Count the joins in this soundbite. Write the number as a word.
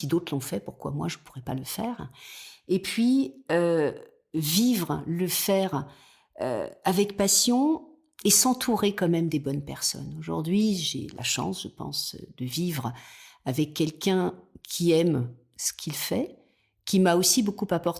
zero